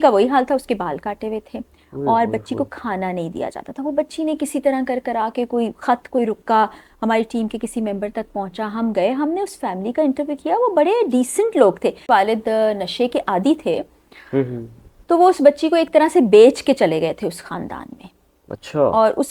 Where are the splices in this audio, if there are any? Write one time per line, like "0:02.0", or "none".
0:12.1